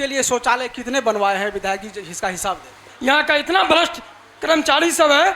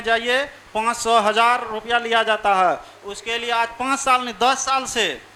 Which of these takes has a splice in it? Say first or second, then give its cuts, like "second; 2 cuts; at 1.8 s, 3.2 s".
first; 1 cut; at 2.8 s